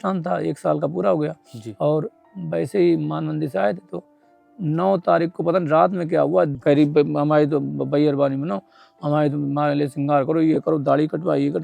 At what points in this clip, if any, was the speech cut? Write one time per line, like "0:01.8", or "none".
0:06.5